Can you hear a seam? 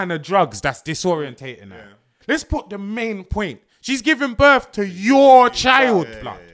yes; 1 cut; at 2.2 s

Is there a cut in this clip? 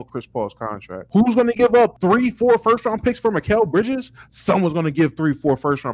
yes; 2 cuts; at 0.9 s, 2.0 s

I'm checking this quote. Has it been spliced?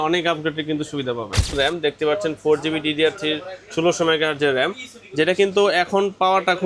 yes; 1 cut; at 1.5 s

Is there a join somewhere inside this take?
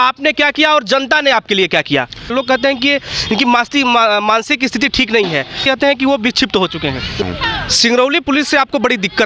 yes; 3 cuts; at 2.3 s, 5.6 s, 7.2 s

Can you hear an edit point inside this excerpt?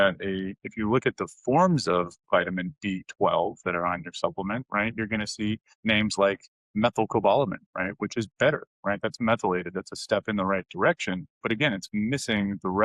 yes; 1 cut; at 5.7 s

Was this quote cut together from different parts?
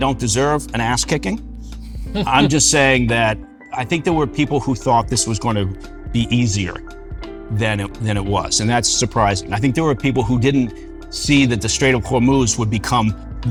no; 0 cuts

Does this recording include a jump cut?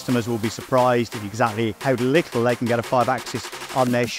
yes; 1 cut; at 1.8 s

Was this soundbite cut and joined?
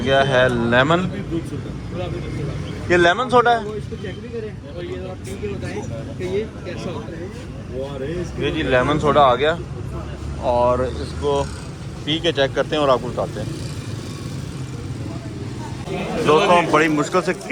yes; 1 cut; at 15.9 s

